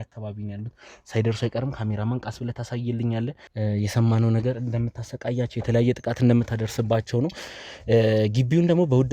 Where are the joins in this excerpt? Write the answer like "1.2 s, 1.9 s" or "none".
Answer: 3.4 s